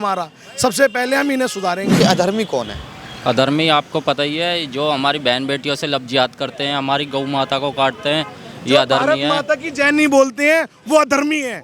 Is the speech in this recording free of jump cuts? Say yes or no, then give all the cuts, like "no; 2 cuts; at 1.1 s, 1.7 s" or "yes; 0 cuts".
no; 1 cut; at 2.0 s